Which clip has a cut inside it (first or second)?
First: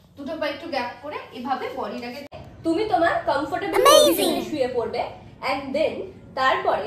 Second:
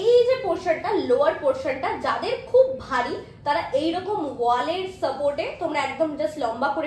first